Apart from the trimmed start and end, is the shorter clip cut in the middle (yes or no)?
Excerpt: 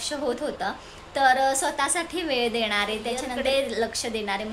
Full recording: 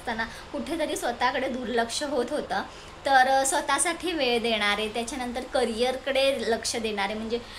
yes